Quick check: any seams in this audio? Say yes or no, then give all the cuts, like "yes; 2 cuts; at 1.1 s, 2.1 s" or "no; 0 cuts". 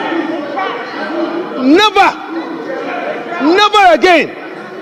no; 0 cuts